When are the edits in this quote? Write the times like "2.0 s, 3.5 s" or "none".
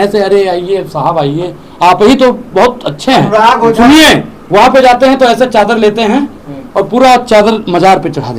none

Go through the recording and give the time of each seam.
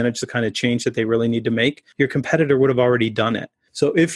1.8 s

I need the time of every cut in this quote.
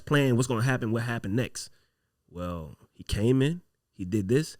none

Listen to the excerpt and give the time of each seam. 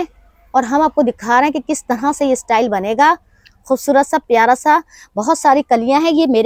none

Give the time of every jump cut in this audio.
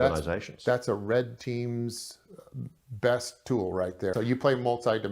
4.1 s

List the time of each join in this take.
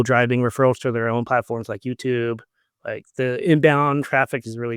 none

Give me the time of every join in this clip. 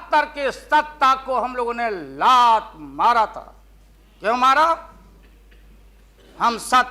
none

